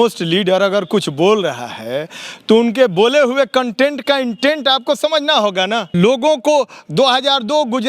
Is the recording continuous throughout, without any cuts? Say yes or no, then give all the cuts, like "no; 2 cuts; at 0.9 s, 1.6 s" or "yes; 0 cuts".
no; 1 cut; at 5.9 s